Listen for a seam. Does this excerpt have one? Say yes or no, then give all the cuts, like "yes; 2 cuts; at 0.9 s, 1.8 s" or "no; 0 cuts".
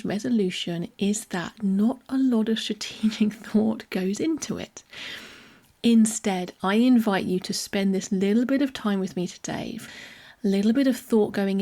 yes; 1 cut; at 9.8 s